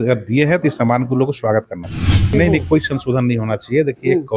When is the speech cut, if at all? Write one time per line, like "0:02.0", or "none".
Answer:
0:02.3